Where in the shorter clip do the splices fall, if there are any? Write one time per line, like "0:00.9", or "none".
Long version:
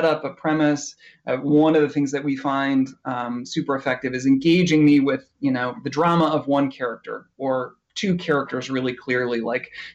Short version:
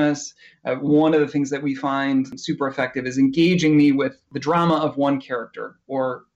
0:02.4
0:04.2